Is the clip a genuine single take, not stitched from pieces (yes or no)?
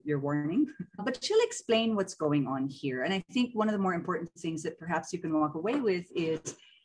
no